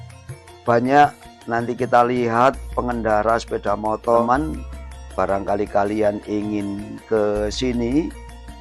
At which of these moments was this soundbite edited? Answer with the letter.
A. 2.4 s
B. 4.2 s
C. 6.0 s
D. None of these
B